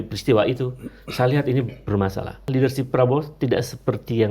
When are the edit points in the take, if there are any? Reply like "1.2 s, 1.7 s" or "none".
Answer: 2.5 s